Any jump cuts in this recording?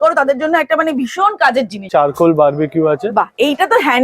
yes; 1 cut; at 1.9 s

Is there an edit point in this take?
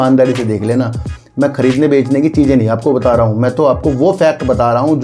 no; 0 cuts

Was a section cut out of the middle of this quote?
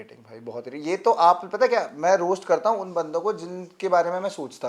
no; 0 cuts

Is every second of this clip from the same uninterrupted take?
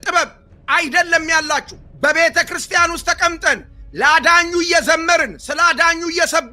no; 1 cut; at 1.8 s

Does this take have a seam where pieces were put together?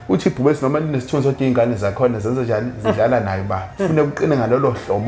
yes; 1 cut; at 3.6 s

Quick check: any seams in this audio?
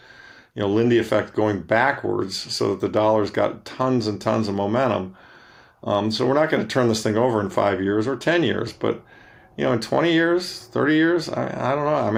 no; 0 cuts

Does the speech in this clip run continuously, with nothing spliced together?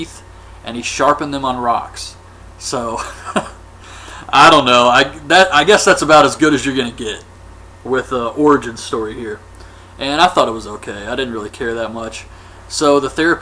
yes; 0 cuts

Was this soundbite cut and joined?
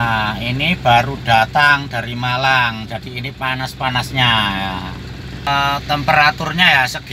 yes; 1 cut; at 5.5 s

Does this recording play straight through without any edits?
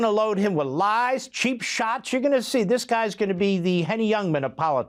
yes; 0 cuts

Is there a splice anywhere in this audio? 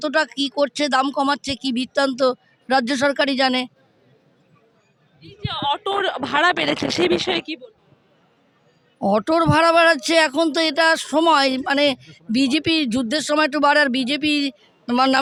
no; 0 cuts

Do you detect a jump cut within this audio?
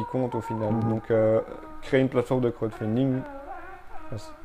no; 0 cuts

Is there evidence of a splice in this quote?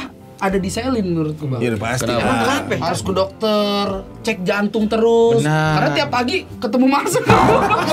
yes; 1 cut; at 2.8 s

